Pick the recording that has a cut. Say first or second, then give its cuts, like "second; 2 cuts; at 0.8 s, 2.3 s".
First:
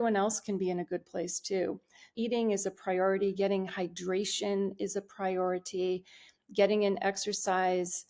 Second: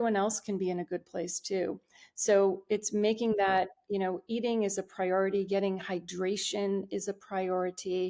first; 1 cut; at 2.1 s